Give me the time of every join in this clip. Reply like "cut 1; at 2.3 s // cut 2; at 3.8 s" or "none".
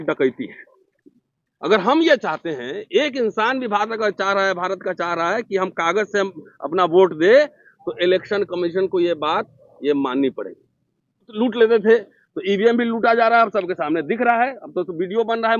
cut 1; at 11.3 s